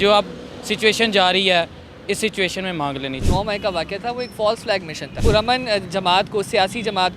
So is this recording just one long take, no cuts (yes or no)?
no